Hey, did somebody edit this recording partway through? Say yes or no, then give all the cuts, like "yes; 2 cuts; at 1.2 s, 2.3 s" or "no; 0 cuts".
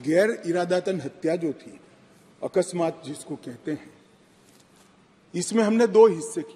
no; 0 cuts